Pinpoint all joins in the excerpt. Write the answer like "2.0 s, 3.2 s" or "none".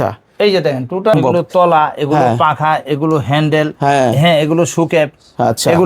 1.1 s

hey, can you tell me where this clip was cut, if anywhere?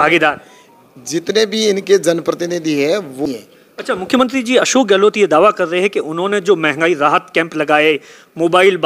3.2 s

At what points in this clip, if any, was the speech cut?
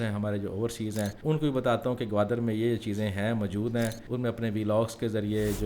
1.2 s, 4.0 s

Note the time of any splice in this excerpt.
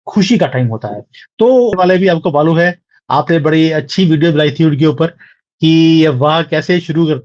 1.7 s

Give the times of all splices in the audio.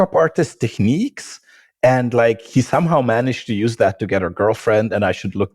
2.5 s

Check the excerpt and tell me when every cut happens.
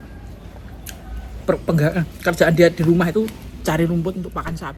none

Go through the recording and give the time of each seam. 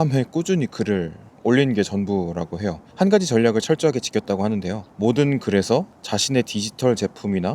2.8 s, 4.8 s, 6.0 s

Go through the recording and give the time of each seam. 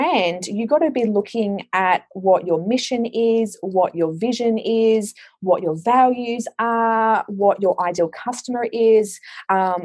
none

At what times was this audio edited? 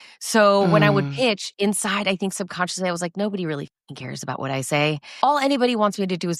5.0 s

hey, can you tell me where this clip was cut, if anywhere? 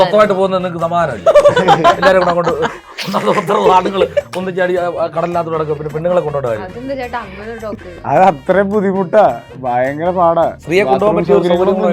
7.8 s, 10.6 s

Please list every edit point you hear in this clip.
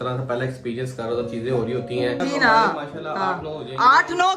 2.2 s

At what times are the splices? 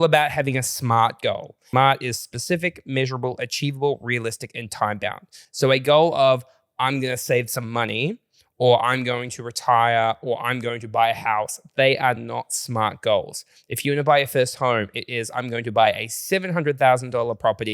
1.6 s

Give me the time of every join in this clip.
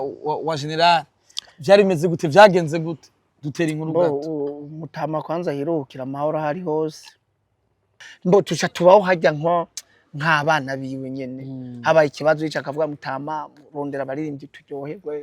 8.1 s

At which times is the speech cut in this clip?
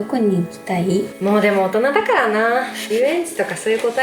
none

